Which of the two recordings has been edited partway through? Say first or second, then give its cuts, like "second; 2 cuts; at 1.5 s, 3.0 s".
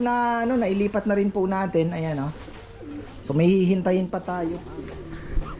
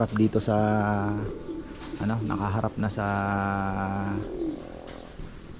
first; 1 cut; at 4.4 s